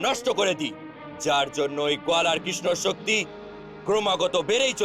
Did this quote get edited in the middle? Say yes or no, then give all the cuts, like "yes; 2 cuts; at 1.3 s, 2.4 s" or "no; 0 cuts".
no; 0 cuts